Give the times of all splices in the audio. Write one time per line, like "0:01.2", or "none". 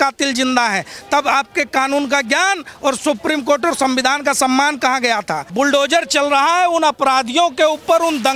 0:05.5